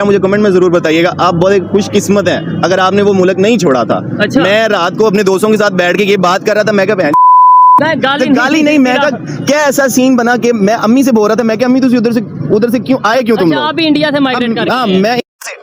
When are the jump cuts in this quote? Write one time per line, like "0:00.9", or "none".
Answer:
none